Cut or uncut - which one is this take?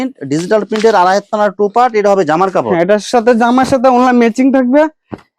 uncut